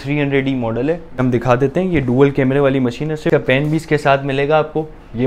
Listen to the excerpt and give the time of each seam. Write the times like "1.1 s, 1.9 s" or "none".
1.2 s, 3.3 s